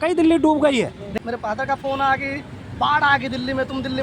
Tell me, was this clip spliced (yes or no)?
yes